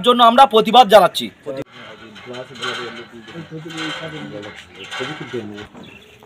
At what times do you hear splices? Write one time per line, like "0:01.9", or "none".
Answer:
0:01.8